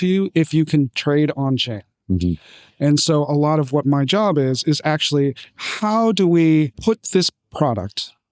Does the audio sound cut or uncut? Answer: cut